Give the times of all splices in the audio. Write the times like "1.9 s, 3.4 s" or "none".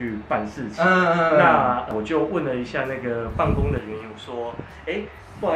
none

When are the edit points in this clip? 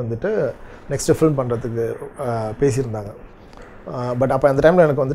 none

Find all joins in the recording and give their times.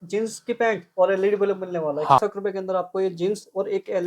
2.2 s

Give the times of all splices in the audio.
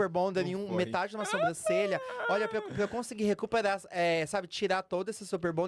none

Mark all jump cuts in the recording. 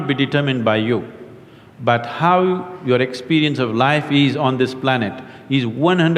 none

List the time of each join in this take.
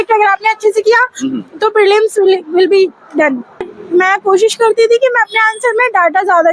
3.7 s

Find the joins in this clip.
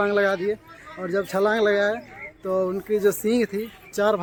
none

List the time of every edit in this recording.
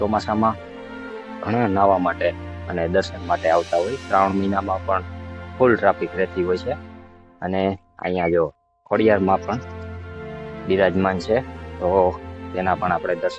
none

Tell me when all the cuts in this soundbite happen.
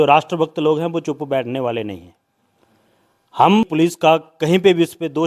3.7 s

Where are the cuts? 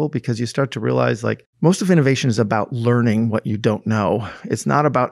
1.5 s

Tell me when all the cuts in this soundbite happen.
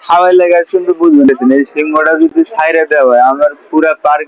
1.3 s

